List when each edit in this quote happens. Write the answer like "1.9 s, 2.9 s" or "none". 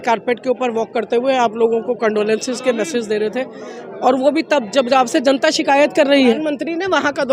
6.4 s